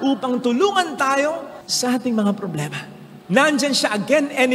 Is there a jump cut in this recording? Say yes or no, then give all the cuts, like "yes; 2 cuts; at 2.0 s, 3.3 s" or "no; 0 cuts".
no; 0 cuts